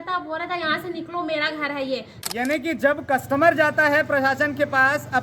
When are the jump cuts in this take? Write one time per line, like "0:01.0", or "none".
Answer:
0:02.2